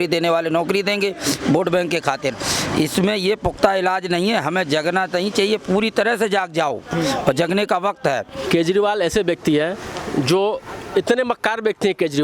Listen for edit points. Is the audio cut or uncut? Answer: cut